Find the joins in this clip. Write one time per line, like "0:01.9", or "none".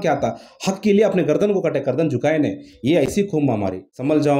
0:03.3